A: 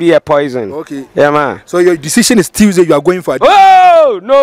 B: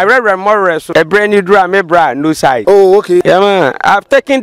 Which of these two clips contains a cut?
B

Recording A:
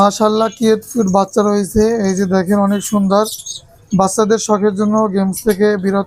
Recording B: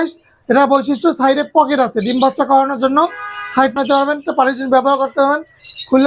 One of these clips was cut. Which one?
B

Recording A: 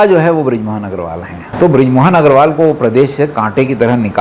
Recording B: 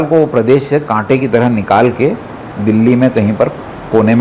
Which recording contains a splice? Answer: A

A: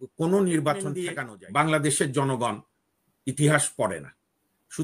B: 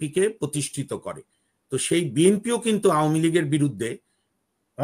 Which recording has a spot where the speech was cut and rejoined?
A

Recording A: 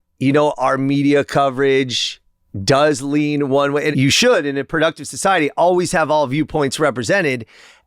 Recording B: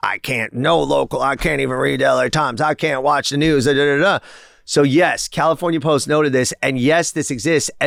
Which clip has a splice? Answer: A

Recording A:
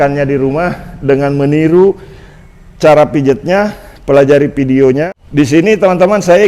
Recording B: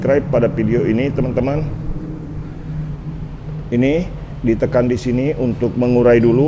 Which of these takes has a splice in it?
A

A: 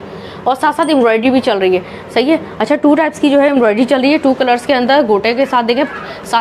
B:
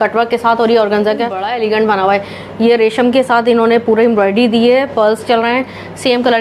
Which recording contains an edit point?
B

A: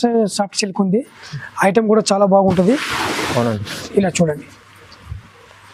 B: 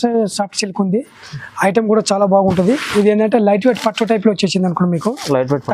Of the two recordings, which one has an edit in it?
B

